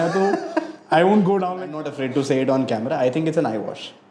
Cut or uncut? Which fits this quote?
cut